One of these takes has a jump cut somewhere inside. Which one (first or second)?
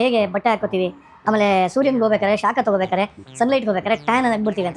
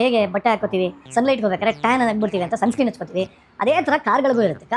second